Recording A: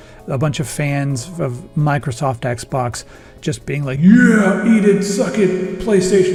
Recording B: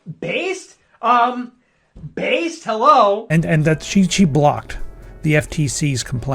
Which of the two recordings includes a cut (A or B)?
B